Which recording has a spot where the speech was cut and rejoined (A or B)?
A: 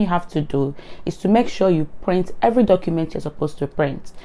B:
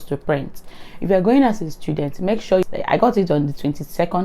B